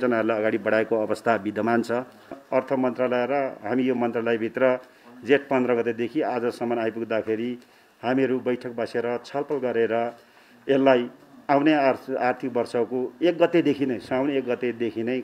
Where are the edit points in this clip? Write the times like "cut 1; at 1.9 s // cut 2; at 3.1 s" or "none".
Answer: cut 1; at 2.4 s